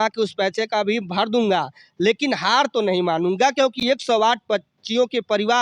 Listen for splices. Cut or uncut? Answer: uncut